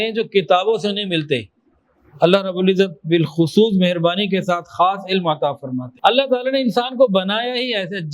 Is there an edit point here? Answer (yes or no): yes